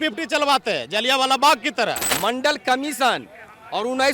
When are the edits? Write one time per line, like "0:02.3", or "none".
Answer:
0:02.1